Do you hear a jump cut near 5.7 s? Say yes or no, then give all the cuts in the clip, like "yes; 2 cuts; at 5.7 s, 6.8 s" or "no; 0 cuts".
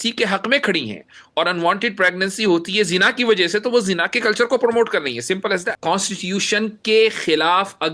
yes; 1 cut; at 5.7 s